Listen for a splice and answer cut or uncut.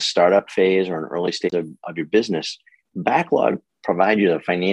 cut